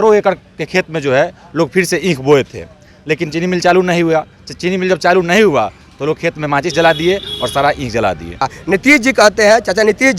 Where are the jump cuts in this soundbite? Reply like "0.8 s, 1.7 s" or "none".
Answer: 8.5 s